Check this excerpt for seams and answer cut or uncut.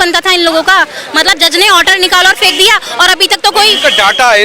uncut